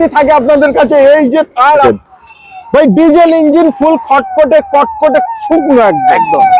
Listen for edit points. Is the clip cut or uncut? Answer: cut